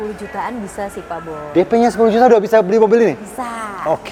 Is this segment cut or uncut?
uncut